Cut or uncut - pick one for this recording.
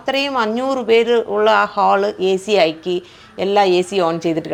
uncut